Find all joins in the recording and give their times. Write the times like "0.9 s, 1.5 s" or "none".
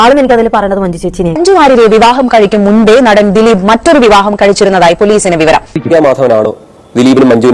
1.4 s, 5.7 s